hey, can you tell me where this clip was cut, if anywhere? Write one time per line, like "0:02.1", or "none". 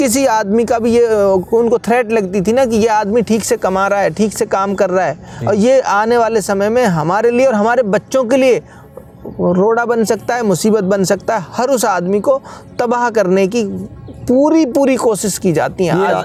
none

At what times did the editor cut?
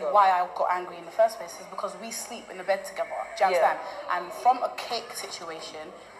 none

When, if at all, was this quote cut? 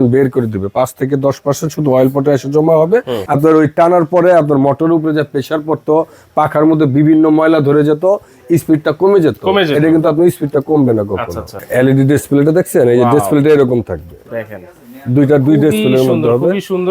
0:03.2
0:11.5

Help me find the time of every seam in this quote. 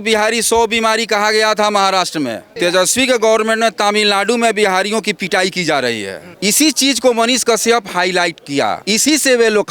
0:02.5
0:06.2
0:08.8

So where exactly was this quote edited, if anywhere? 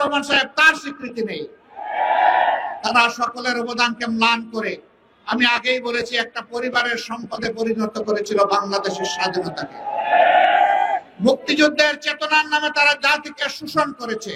none

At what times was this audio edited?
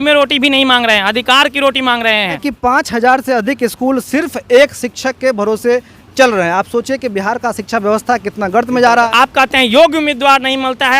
0:02.5
0:09.1

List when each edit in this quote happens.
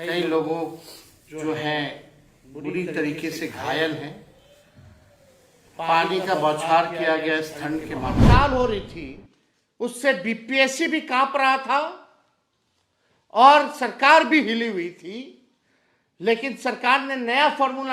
0:08.2

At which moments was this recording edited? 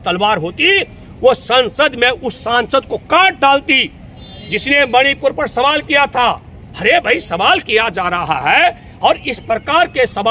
none

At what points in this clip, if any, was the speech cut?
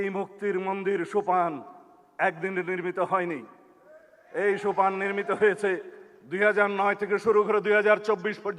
none

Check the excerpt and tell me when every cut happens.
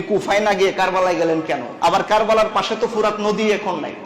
0:01.7

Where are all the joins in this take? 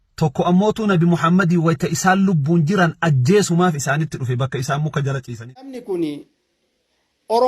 0:05.8

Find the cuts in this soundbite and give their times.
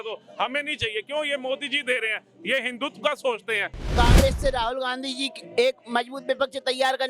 0:03.9

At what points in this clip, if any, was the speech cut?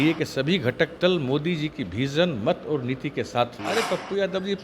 0:03.6

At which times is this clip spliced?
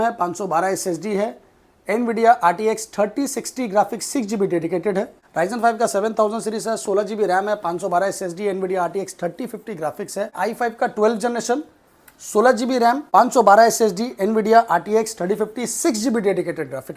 0:05.2
0:10.3
0:13.0

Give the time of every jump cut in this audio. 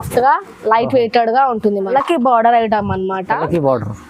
0:01.9

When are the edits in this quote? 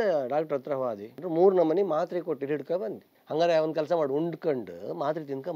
0:01.2
0:03.1

